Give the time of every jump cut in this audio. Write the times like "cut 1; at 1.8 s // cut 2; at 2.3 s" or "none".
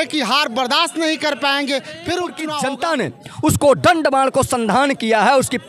cut 1; at 2.5 s